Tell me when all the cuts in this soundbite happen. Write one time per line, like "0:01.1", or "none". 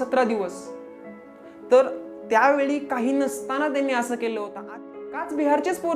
0:04.9